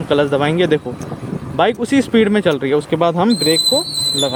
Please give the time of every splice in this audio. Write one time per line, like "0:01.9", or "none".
none